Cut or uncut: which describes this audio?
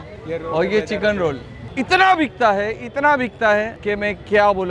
cut